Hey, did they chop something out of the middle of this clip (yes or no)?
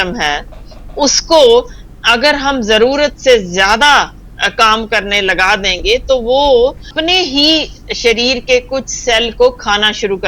yes